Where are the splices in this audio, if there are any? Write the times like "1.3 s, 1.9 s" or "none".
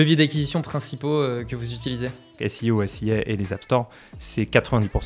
2.4 s